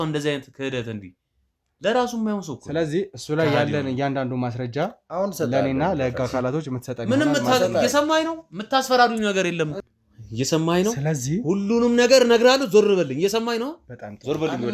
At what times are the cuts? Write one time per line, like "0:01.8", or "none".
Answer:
0:09.9